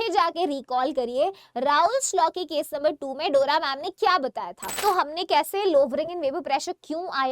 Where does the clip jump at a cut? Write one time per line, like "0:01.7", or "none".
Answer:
0:04.8